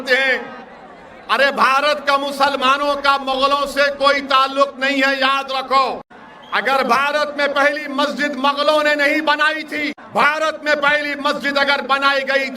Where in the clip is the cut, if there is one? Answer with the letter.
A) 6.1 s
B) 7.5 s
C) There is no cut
A